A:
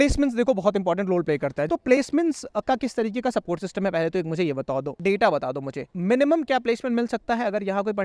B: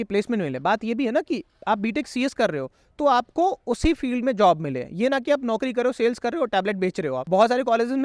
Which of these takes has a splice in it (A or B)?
A